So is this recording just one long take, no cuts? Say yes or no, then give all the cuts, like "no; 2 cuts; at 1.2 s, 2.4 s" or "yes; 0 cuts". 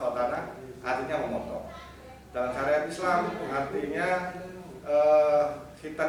yes; 0 cuts